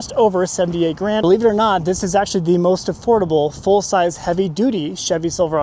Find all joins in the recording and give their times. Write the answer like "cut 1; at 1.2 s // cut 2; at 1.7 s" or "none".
cut 1; at 1.2 s